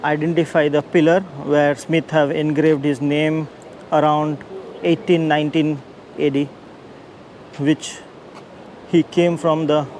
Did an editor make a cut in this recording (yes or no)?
no